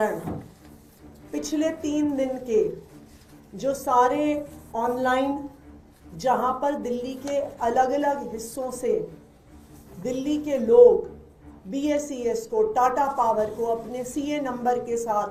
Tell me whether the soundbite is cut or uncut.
uncut